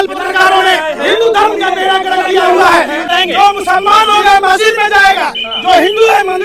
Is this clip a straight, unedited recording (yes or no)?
no